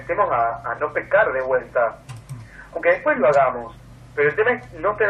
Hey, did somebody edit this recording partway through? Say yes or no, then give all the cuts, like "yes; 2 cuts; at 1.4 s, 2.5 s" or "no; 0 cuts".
no; 0 cuts